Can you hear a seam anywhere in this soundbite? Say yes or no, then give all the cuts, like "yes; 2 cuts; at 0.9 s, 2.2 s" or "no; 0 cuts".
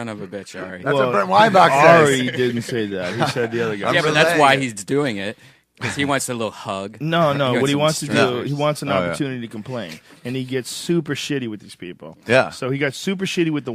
yes; 1 cut; at 3.1 s